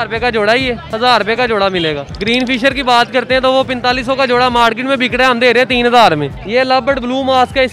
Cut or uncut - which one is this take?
cut